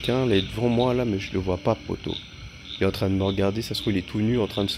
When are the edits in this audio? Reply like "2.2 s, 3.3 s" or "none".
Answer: none